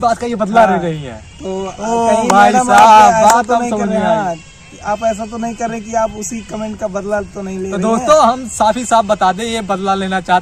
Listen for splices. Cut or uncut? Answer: uncut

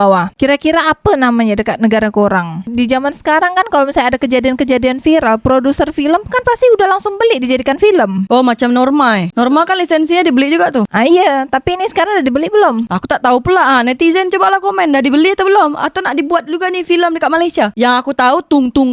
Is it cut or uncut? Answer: cut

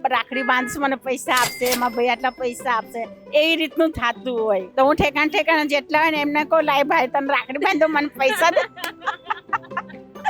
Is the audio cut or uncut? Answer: cut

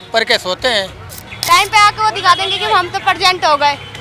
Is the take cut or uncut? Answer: cut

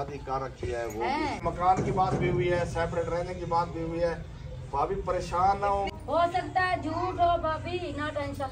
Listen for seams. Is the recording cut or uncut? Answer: cut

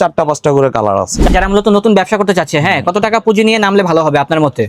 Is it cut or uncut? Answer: cut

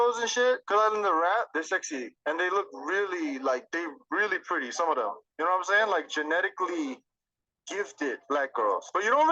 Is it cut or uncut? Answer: cut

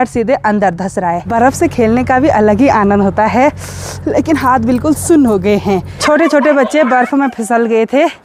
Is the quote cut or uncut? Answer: cut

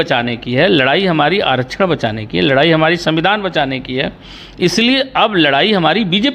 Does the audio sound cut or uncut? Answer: uncut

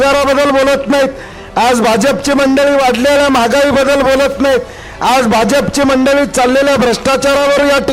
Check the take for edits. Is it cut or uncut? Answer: uncut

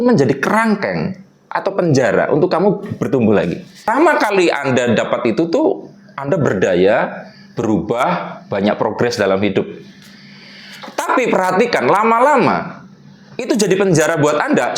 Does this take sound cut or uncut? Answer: cut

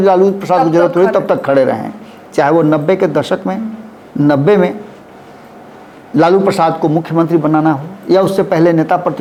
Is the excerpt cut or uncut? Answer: uncut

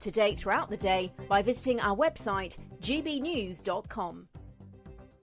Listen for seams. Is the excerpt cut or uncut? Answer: cut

